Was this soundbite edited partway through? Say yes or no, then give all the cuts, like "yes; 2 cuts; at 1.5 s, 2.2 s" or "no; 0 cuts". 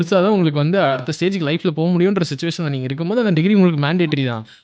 yes; 1 cut; at 1.0 s